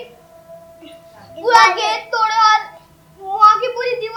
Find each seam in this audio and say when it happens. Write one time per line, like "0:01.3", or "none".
none